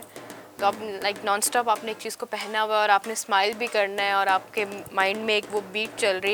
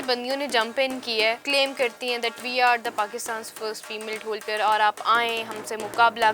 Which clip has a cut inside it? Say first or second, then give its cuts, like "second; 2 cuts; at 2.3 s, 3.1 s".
second; 1 cut; at 1.4 s